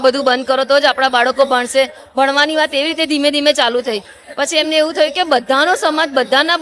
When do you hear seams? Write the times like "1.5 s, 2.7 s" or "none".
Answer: none